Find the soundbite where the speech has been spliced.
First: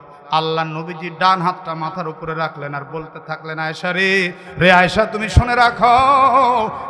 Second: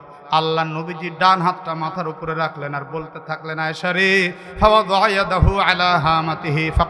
first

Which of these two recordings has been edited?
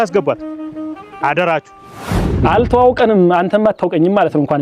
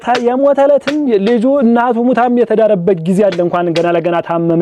first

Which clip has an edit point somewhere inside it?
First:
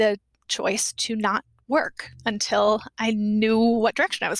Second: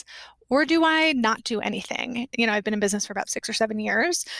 second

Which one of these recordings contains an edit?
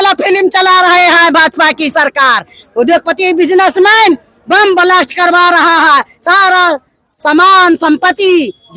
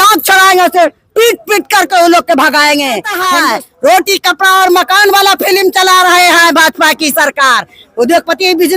second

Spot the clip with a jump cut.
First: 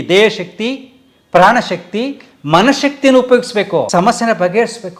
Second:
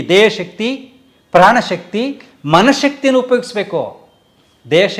first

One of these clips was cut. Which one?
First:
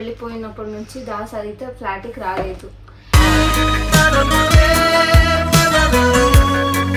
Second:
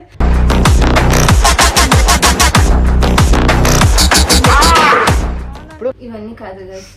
second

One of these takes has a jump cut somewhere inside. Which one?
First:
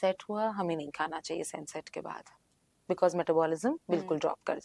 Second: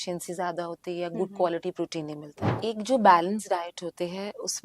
second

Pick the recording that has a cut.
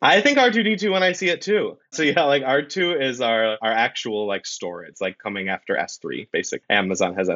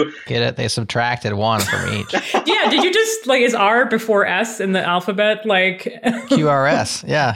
first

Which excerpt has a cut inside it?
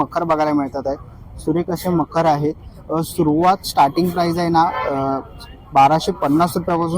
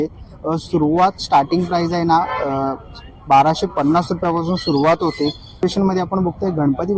second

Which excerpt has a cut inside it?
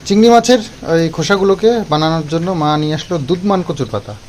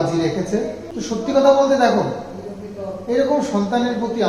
second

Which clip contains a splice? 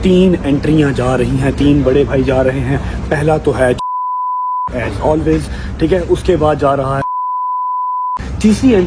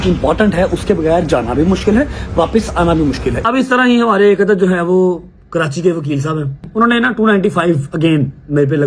second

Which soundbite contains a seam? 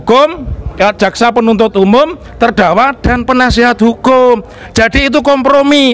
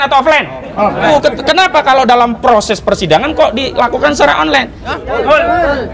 second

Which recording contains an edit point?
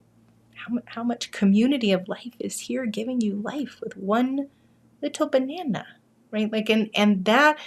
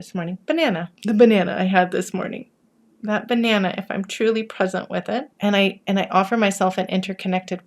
second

